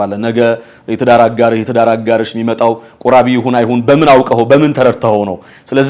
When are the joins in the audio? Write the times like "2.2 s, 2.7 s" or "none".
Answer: none